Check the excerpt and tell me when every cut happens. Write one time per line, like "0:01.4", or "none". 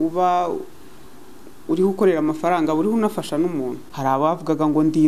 0:03.8